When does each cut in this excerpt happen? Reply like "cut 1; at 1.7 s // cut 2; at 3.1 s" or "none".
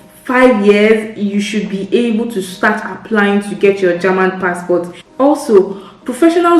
cut 1; at 5.0 s